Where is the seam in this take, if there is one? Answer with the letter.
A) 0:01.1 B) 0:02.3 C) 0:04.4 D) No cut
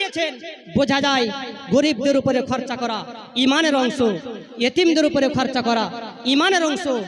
D